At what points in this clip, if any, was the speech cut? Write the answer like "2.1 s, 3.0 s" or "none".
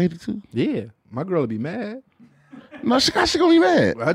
1.0 s